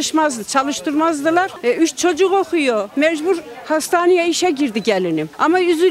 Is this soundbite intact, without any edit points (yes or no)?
yes